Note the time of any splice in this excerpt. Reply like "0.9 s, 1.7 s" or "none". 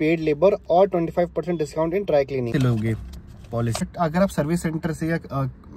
2.5 s, 3.8 s